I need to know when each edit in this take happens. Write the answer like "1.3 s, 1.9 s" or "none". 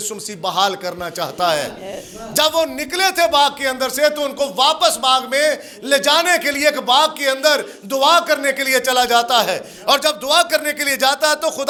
none